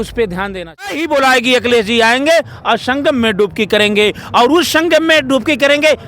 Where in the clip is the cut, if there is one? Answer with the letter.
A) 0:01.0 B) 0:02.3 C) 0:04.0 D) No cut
A